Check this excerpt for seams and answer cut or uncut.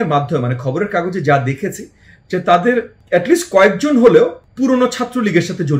cut